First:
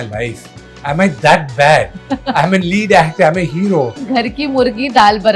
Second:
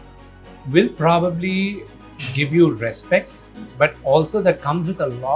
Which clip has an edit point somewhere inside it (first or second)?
first